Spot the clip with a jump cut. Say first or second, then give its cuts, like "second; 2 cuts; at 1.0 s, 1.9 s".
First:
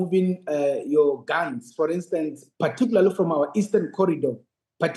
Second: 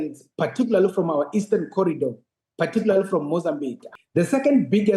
second; 1 cut; at 3.8 s